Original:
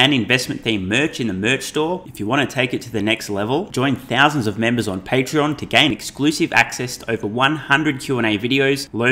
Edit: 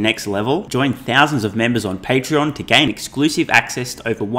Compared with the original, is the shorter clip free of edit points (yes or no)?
yes